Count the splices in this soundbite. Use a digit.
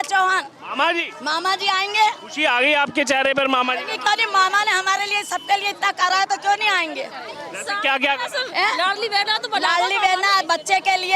0